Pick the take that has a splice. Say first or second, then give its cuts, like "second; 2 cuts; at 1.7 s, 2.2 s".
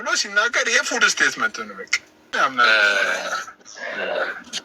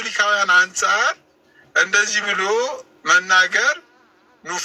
first; 1 cut; at 2.3 s